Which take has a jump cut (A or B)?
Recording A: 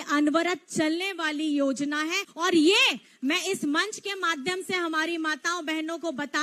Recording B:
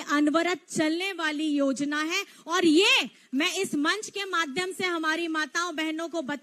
A